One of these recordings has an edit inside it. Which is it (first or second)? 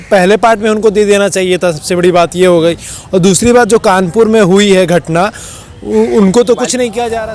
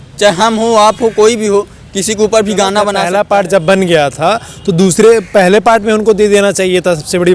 second